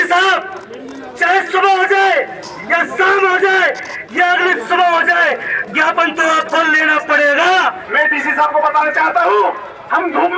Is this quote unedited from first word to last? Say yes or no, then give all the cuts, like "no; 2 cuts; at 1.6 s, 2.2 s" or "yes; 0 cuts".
no; 1 cut; at 7.8 s